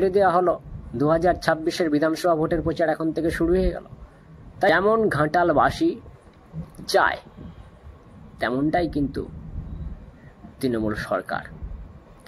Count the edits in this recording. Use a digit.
1